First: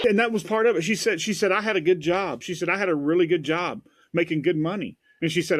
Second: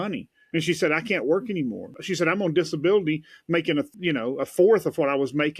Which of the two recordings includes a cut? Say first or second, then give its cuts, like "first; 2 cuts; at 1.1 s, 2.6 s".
second; 2 cuts; at 2.0 s, 3.9 s